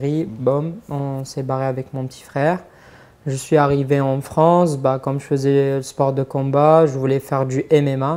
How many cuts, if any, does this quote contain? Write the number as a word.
zero